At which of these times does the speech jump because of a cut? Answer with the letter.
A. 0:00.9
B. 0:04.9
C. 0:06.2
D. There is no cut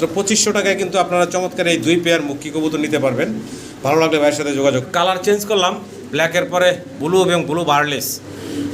B